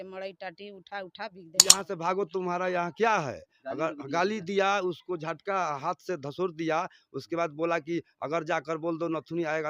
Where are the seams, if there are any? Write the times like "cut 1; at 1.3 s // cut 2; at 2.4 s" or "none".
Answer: cut 1; at 1.8 s